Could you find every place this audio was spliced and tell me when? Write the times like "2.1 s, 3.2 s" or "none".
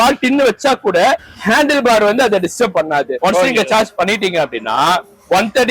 1.3 s, 3.1 s